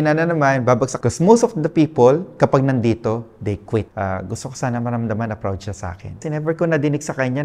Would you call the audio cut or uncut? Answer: cut